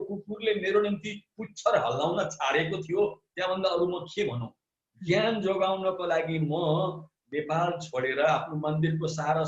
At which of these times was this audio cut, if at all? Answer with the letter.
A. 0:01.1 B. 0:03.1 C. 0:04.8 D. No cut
D